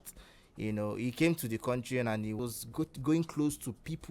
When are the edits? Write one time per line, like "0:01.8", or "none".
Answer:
0:02.4

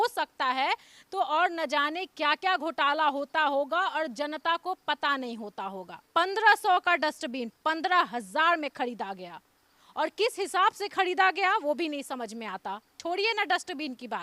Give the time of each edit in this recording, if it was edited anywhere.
0:06.0
0:13.0

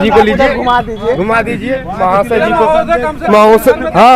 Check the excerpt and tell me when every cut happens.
none

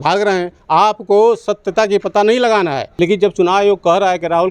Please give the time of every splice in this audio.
0:02.8

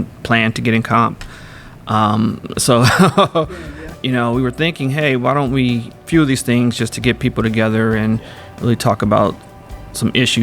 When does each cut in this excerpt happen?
0:03.4
0:05.9

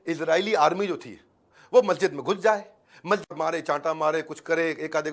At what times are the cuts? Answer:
0:03.3

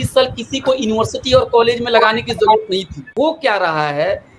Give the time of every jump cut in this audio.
0:03.1

